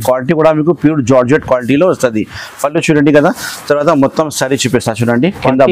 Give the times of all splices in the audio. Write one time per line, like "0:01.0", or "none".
none